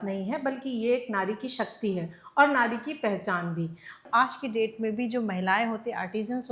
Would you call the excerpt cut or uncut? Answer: cut